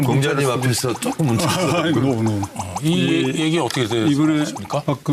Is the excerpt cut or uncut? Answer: uncut